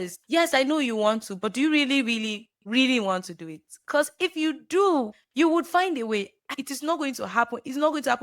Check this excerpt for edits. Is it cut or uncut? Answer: cut